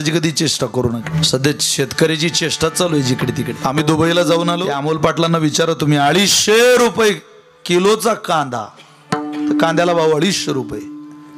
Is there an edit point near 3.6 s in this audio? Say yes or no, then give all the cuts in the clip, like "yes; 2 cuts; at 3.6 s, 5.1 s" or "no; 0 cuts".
yes; 3 cuts; at 1.1 s, 3.6 s, 4.8 s